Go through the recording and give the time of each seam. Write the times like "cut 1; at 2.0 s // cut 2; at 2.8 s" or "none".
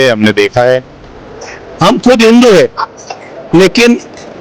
cut 1; at 1.2 s